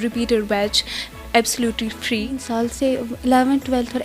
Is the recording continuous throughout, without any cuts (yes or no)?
no